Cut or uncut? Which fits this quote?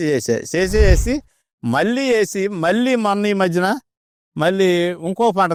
uncut